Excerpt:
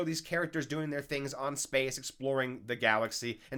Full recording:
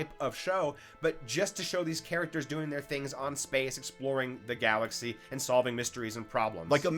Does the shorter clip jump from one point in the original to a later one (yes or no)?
no